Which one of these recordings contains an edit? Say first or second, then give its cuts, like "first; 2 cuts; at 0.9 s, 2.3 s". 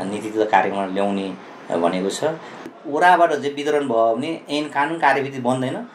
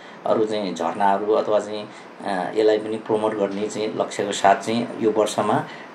first; 1 cut; at 2.7 s